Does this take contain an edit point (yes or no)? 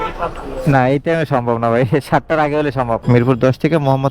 yes